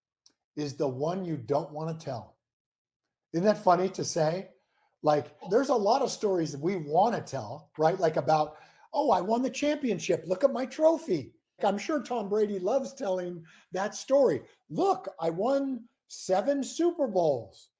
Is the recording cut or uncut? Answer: cut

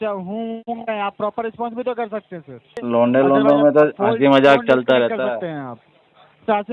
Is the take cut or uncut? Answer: cut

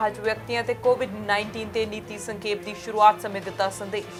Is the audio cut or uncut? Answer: uncut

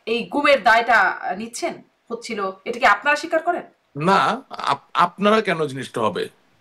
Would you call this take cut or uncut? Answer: uncut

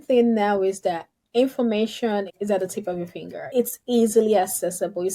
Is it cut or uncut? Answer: cut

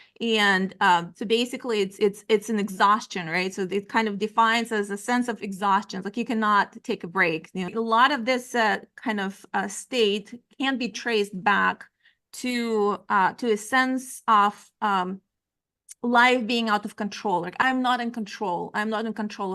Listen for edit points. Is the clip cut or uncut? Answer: cut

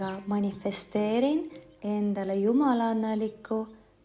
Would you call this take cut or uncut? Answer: uncut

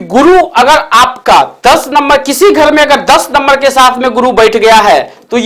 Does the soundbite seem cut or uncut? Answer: uncut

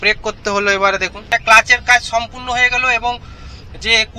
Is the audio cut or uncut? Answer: cut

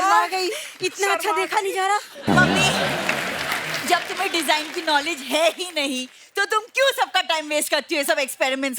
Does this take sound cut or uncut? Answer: uncut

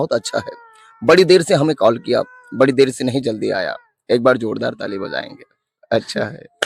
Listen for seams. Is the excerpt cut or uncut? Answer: uncut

